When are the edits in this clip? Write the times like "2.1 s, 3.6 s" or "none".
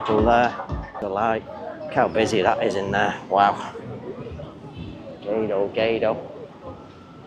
1.0 s